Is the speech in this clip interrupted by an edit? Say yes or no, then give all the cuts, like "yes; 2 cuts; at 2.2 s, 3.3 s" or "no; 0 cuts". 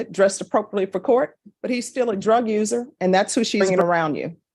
yes; 1 cut; at 3.6 s